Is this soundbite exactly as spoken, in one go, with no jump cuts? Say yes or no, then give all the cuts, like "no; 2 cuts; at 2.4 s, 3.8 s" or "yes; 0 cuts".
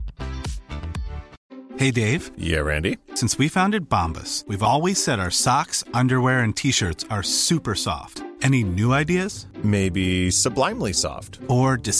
no; 1 cut; at 1.3 s